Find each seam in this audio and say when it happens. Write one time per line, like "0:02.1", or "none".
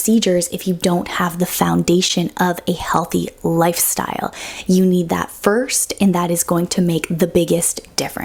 none